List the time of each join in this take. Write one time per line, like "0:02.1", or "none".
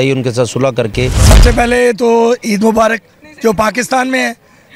0:01.3